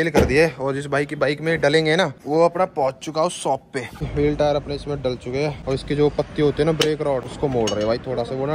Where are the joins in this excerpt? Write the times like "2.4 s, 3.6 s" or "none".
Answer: 2.2 s, 4.1 s, 5.6 s, 7.3 s